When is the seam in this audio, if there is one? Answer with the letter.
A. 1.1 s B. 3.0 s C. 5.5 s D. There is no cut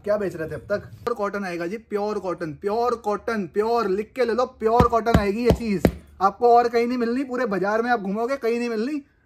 A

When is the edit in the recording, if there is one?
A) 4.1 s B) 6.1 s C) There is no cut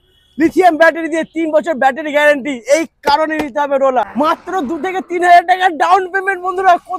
A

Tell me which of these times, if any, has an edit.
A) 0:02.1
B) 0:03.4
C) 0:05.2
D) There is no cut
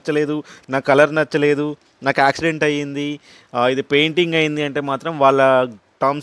D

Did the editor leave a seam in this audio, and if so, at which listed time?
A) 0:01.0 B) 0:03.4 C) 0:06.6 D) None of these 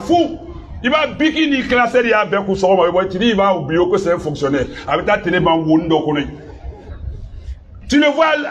D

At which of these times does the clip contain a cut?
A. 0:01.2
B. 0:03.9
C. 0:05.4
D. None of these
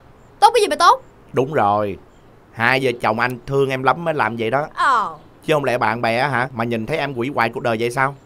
A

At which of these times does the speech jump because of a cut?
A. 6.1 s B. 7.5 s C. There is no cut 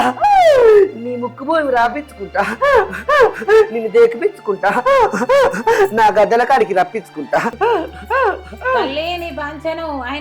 B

